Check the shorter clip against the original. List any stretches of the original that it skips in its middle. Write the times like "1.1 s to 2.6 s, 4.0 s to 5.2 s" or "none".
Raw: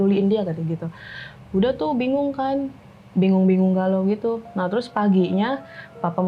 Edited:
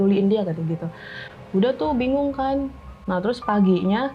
3.0 s to 4.5 s